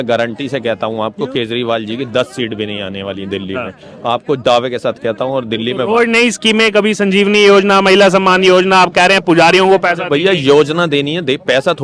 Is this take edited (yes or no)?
no